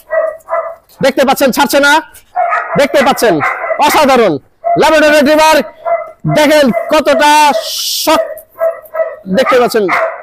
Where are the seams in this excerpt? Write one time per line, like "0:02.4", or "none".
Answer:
none